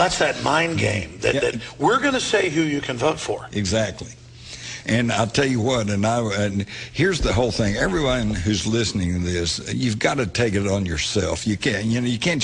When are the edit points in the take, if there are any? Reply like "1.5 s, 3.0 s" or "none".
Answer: none